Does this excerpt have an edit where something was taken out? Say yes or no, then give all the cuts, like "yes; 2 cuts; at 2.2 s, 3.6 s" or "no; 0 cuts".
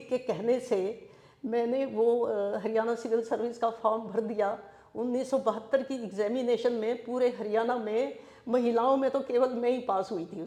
no; 0 cuts